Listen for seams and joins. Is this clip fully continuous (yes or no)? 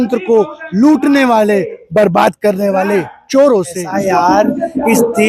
no